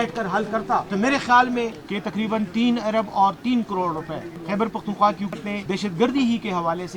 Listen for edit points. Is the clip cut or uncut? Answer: cut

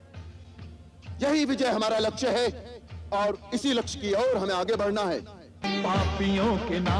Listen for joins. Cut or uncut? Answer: cut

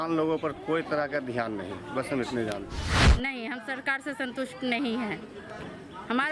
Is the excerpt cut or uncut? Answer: cut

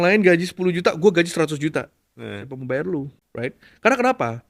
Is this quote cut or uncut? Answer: cut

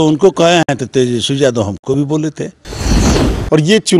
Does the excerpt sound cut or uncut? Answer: cut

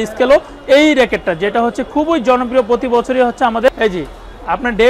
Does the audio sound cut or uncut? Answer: cut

